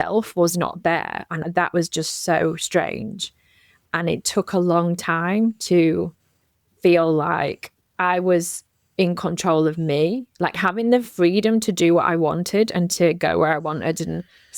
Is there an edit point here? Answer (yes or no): no